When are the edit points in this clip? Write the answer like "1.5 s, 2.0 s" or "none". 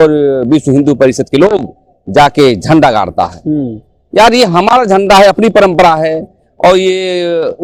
none